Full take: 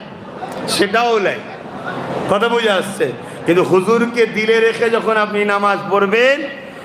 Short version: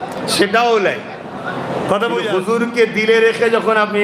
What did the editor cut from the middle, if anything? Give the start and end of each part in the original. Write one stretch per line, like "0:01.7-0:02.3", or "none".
0:02.8-0:03.8